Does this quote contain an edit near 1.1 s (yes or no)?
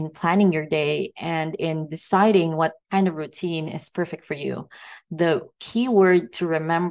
no